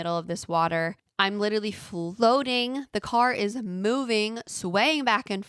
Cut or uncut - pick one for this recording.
cut